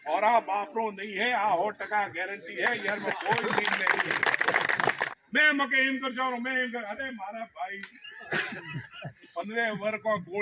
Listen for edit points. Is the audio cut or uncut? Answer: cut